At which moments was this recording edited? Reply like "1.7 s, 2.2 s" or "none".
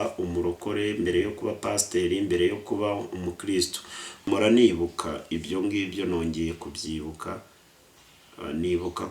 4.2 s